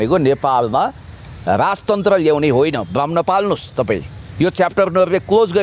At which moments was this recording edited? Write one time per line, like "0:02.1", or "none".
none